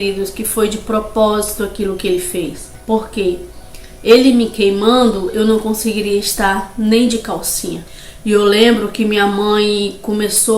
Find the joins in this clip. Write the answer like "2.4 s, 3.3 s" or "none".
none